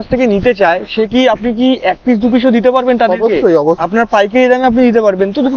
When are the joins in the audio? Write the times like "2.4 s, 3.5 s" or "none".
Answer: 3.8 s